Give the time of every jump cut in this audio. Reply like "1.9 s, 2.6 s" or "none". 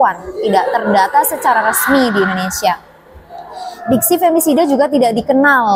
none